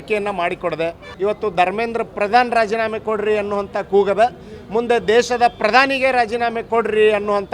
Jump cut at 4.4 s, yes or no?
no